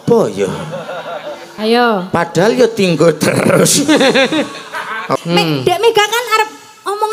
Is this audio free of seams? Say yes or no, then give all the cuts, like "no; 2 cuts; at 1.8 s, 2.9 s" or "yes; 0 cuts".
no; 1 cut; at 5.1 s